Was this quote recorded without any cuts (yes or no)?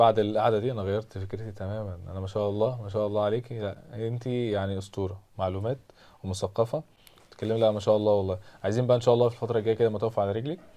yes